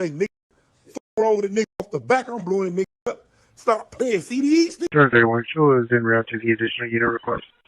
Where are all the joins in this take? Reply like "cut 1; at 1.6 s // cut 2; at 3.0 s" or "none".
cut 1; at 4.8 s

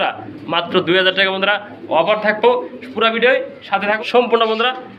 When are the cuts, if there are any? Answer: cut 1; at 4.0 s

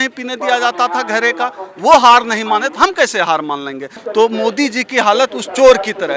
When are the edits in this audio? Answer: cut 1; at 3.9 s

